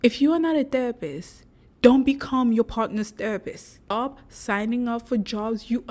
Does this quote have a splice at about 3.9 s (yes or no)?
yes